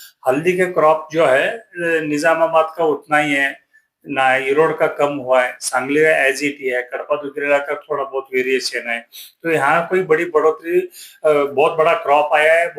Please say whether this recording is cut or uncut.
uncut